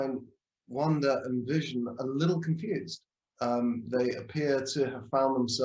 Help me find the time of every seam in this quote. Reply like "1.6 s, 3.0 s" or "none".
none